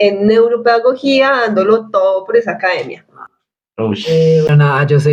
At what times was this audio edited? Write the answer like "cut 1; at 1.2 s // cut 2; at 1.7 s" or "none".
none